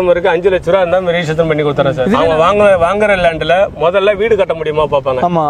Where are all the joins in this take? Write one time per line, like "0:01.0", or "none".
0:02.2